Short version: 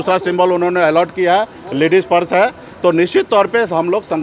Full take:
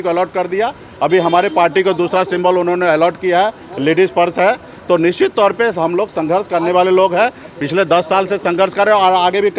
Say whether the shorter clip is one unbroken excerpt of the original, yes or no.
yes